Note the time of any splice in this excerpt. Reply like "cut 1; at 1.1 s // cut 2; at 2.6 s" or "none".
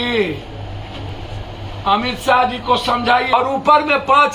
cut 1; at 1.1 s // cut 2; at 3.3 s